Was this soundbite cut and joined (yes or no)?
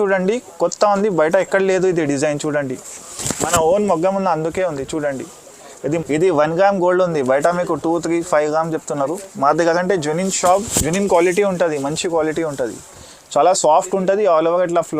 yes